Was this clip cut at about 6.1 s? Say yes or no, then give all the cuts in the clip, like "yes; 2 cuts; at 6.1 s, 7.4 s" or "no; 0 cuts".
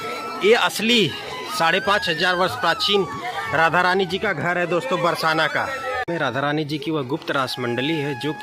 yes; 1 cut; at 6.1 s